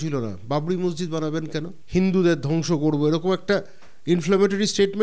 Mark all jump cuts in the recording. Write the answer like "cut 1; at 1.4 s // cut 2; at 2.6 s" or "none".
cut 1; at 1.7 s